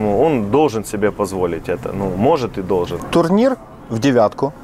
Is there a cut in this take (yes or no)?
yes